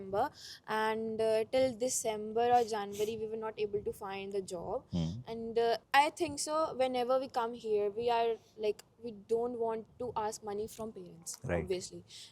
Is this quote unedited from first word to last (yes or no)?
yes